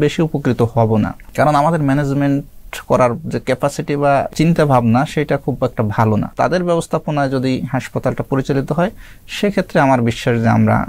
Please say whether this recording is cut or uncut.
uncut